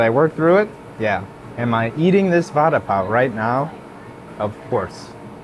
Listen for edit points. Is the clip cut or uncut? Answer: uncut